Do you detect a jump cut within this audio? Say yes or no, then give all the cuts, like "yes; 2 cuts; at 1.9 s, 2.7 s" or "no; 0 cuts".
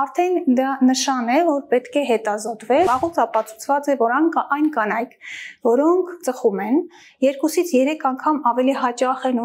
yes; 1 cut; at 2.9 s